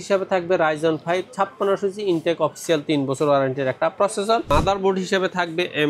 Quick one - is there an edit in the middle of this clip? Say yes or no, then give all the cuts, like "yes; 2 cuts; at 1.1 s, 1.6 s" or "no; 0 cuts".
yes; 1 cut; at 4.5 s